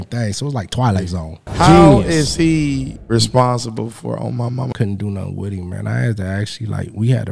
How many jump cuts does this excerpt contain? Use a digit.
3